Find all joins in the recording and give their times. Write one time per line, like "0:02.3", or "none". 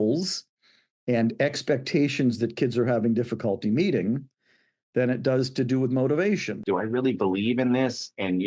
0:06.6